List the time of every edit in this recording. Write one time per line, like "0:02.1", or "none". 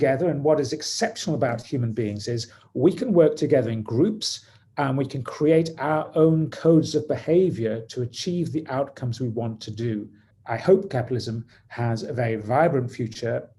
0:10.3